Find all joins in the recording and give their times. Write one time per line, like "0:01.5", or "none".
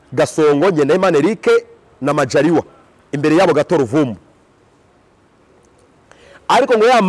none